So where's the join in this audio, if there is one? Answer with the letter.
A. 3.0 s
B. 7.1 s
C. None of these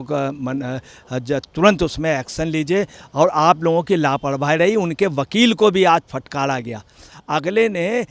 B